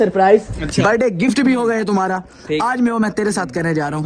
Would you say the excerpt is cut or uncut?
uncut